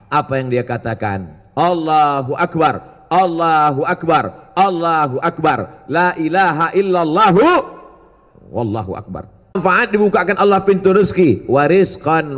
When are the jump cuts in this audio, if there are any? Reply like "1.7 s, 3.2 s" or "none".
9.6 s